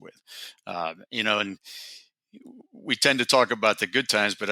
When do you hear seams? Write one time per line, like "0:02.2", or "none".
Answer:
none

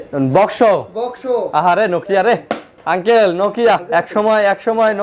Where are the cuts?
0:03.8

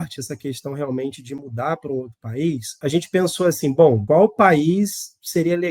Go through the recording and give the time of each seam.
0:02.7
0:04.0

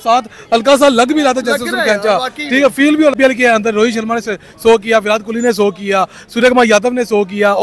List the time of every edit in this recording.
0:03.2

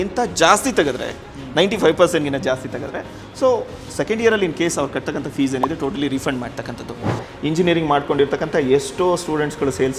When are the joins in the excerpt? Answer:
0:07.2

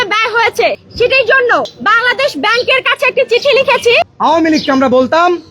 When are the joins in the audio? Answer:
0:01.8
0:04.1

